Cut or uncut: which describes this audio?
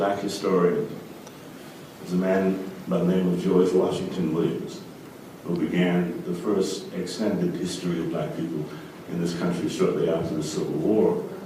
uncut